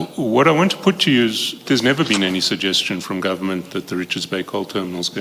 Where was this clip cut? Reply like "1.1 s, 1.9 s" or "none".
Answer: 1.6 s